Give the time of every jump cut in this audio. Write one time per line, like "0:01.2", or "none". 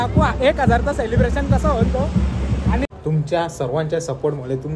0:02.9